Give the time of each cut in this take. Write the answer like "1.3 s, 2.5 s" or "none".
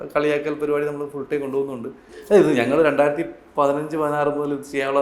2.1 s